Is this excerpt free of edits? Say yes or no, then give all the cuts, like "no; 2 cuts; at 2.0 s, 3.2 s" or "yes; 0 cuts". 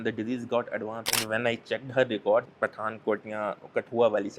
no; 2 cuts; at 1.0 s, 2.5 s